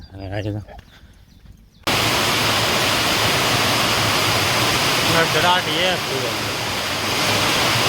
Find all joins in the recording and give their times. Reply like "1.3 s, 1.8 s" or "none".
1.8 s

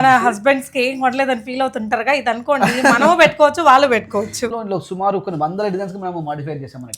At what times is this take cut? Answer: 4.5 s

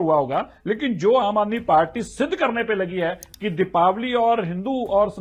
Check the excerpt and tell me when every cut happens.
none

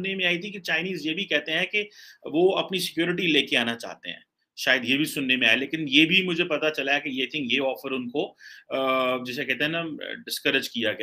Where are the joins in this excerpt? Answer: none

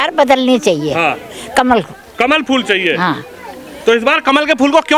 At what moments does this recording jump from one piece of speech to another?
none

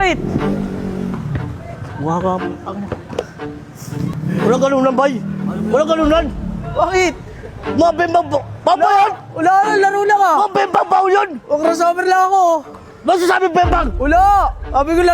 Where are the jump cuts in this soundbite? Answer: 4.2 s

